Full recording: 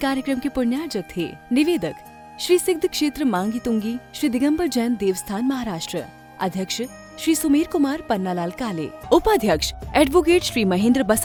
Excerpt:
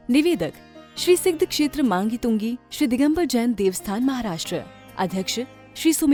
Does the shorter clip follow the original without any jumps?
yes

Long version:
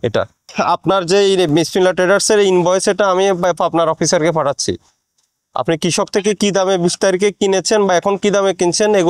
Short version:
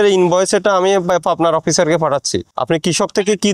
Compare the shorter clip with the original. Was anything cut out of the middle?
yes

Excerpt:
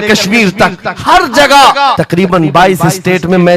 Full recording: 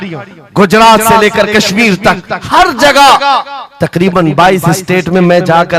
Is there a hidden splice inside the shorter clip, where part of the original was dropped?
yes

